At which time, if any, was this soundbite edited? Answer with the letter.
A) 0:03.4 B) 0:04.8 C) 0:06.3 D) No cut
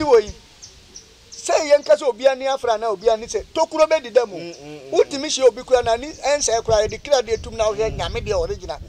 D